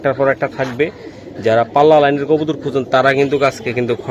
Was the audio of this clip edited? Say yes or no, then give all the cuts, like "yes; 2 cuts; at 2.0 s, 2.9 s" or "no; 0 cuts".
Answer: no; 0 cuts